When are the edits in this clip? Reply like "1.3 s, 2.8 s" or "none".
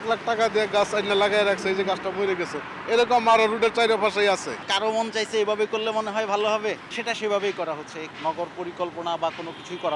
4.7 s, 6.9 s, 8.0 s